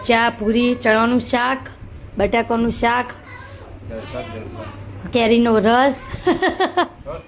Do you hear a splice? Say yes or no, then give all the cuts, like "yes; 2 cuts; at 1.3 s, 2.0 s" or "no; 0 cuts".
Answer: no; 0 cuts